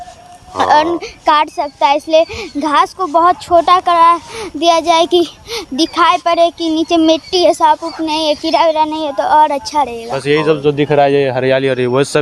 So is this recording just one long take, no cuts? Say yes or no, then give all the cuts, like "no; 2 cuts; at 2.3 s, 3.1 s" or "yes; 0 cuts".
no; 1 cut; at 10.1 s